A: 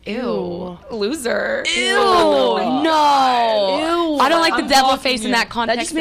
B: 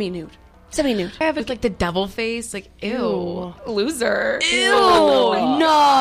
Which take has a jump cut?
B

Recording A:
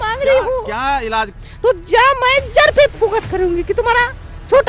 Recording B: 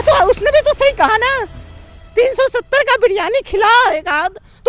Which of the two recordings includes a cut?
A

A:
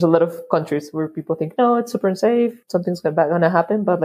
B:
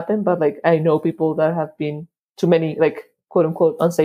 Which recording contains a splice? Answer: A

